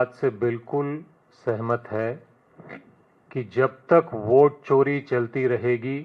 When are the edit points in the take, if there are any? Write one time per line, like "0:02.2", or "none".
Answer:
none